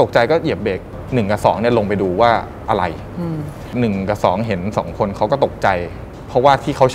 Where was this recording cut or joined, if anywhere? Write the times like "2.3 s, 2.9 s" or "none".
0.9 s, 3.7 s